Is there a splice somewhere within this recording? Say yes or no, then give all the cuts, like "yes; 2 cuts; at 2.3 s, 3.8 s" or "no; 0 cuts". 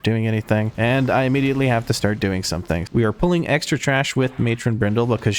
yes; 1 cut; at 2.9 s